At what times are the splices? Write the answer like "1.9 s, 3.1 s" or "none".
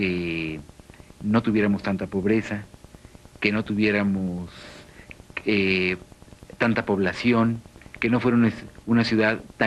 none